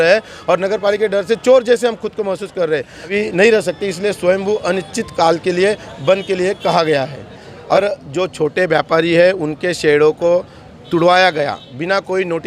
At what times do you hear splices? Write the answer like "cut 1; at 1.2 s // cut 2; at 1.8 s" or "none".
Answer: cut 1; at 3.1 s // cut 2; at 7.8 s